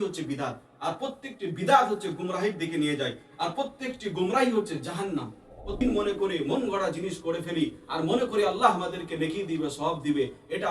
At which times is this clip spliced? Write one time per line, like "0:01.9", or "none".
0:05.8